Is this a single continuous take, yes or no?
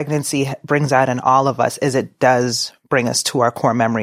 yes